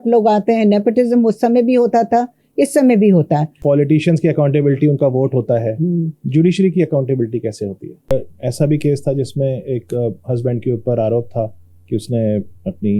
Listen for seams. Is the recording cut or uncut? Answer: cut